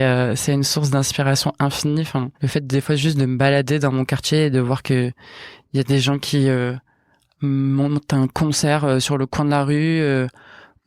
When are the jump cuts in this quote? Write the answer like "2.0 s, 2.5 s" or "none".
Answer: 2.3 s